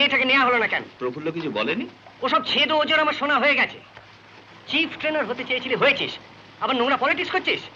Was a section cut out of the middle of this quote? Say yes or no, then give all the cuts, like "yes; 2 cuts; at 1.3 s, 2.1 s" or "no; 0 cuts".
yes; 1 cut; at 0.9 s